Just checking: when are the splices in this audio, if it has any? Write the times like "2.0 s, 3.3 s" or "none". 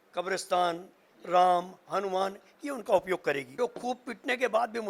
3.5 s